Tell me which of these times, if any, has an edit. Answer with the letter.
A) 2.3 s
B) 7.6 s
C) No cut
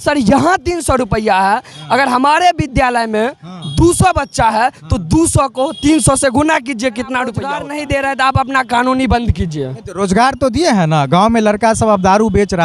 B